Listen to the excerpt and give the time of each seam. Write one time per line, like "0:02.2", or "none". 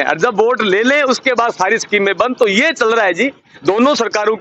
none